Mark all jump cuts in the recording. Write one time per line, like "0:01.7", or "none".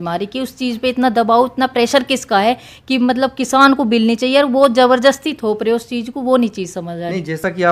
none